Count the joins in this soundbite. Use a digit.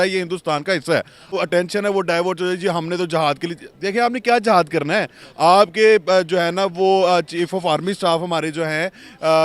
1